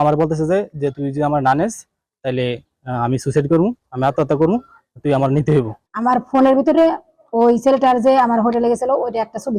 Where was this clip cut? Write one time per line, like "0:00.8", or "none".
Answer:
0:05.8